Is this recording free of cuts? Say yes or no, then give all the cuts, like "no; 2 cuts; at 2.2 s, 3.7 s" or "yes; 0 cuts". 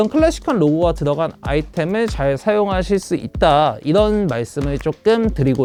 yes; 0 cuts